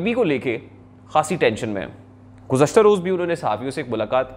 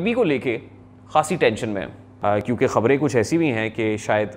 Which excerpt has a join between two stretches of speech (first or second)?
second